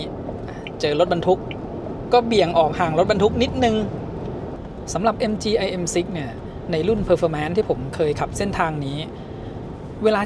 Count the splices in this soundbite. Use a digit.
1